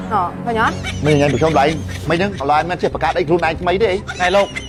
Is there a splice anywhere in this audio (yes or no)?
no